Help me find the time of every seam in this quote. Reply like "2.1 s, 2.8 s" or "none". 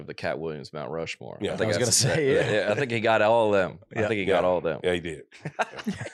none